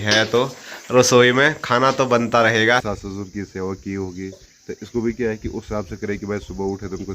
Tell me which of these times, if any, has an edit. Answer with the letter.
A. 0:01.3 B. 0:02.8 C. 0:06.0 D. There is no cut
B